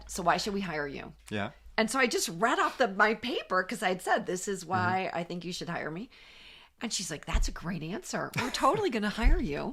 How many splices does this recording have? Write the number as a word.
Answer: zero